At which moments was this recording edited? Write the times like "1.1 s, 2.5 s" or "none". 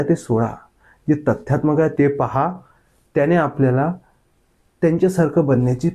1.9 s